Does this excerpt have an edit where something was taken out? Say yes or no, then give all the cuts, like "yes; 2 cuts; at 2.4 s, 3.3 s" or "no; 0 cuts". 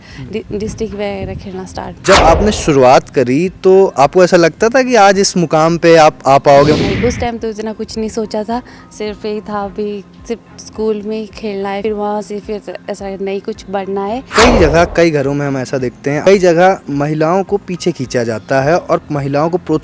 yes; 5 cuts; at 2.0 s, 6.8 s, 11.8 s, 14.3 s, 16.2 s